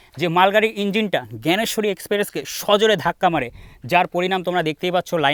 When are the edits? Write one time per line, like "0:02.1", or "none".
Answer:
none